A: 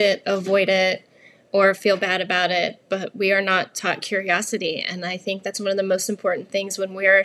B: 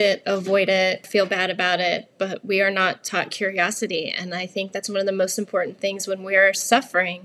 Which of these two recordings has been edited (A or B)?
B